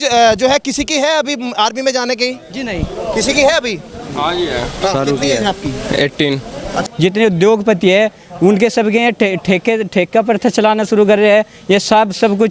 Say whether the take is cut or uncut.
cut